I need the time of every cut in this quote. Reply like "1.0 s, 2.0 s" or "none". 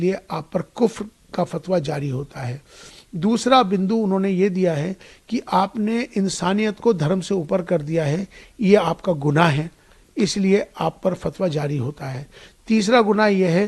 none